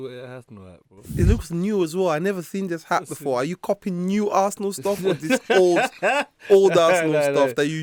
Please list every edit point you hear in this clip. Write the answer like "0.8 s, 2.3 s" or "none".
none